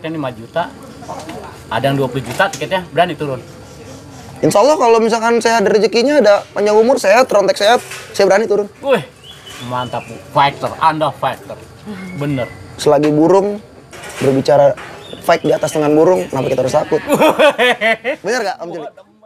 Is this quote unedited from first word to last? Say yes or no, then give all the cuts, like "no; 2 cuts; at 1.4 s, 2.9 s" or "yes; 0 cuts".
yes; 0 cuts